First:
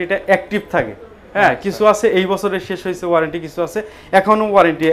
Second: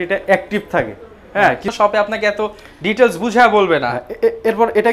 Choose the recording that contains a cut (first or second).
second